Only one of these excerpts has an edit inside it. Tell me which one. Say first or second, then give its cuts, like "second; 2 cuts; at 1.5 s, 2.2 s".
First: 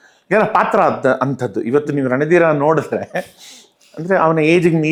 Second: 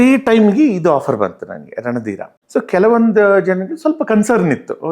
second; 1 cut; at 2.3 s